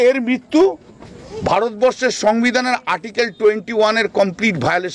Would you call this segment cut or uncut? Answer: uncut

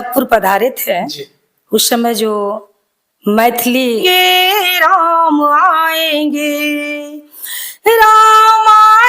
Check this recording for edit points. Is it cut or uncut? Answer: cut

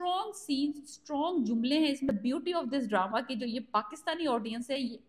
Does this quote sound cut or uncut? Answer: cut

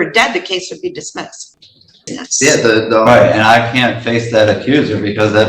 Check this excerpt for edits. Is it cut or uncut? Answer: cut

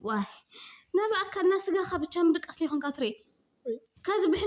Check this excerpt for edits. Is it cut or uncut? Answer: uncut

